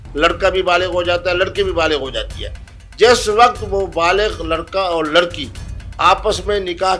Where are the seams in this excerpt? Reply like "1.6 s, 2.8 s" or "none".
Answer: none